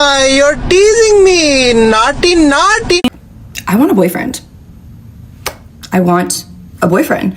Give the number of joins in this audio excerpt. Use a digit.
1